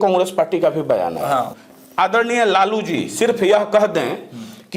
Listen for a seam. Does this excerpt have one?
yes; 1 cut; at 1.5 s

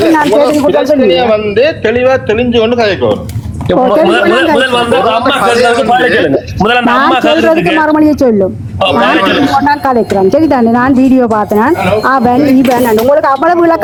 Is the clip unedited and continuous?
yes; 0 cuts

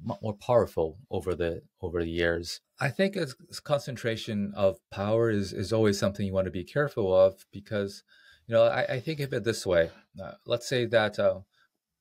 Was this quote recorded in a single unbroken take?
no; 1 cut; at 2.6 s

